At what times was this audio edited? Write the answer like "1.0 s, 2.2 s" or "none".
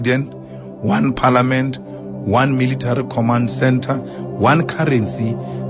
none